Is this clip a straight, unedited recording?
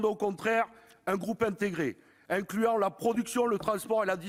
yes; 0 cuts

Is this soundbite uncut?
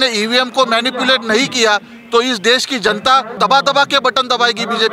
no; 1 cut; at 3.4 s

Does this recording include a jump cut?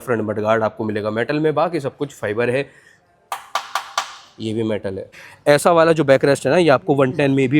yes; 1 cut; at 5.3 s

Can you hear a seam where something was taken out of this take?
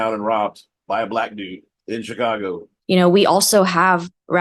yes; 1 cut; at 2.7 s

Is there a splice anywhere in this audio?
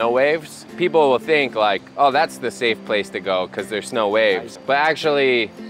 no; 0 cuts

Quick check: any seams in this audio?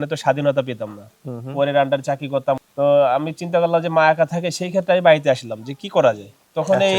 yes; 1 cut; at 2.6 s

